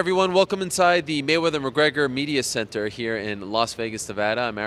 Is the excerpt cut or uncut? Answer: uncut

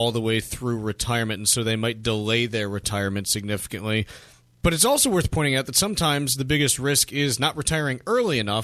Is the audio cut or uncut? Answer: uncut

